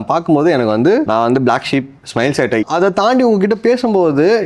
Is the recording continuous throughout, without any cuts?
no; 2 cuts; at 1.1 s, 2.6 s

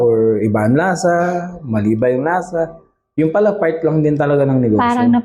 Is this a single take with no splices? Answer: yes; 0 cuts

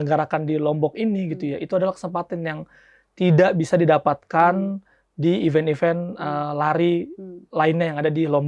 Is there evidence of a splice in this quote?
no; 0 cuts

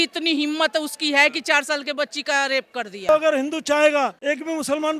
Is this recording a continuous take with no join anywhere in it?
no; 1 cut; at 3.1 s

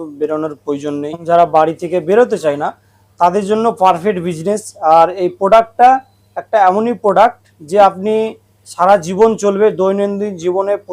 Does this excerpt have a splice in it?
yes; 1 cut; at 1.2 s

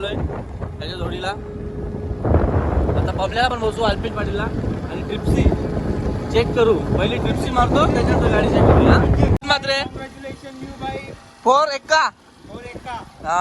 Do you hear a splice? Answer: yes; 1 cut; at 9.4 s

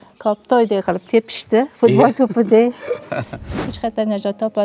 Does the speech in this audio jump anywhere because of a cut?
yes; 1 cut; at 3.5 s

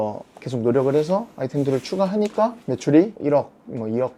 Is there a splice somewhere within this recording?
no; 0 cuts

